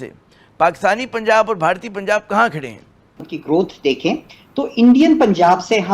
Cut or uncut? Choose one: cut